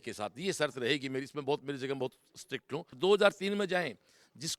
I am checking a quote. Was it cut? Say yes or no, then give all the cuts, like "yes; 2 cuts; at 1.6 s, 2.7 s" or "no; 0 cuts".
yes; 1 cut; at 2.9 s